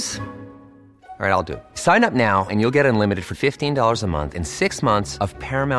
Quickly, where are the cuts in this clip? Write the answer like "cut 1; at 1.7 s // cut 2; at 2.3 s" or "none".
none